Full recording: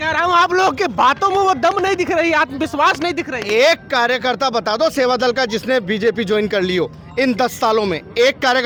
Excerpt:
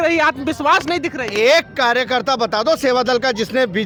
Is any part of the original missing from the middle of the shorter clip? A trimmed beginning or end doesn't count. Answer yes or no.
no